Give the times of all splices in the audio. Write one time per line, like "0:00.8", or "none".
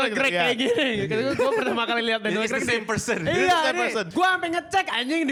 none